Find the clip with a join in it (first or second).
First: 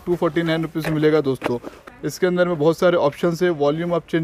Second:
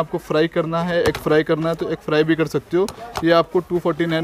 first